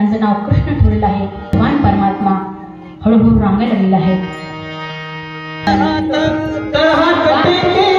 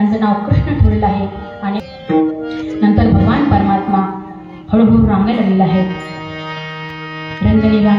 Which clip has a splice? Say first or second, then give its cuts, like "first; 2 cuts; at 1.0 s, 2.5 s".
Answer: first; 2 cuts; at 1.5 s, 5.7 s